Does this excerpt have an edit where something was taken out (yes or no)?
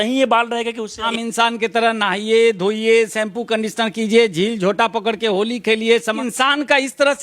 yes